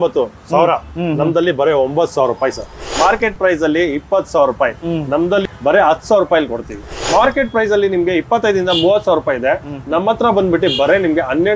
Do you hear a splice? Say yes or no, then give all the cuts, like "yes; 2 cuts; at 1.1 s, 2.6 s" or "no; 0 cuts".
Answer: yes; 3 cuts; at 2.9 s, 5.4 s, 6.9 s